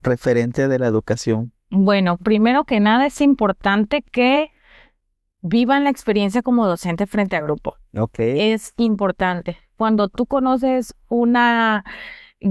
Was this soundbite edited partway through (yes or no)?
no